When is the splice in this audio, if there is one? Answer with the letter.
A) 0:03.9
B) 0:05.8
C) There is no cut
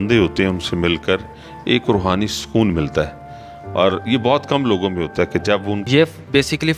B